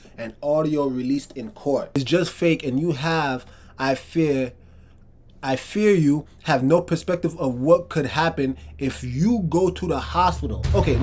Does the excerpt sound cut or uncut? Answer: cut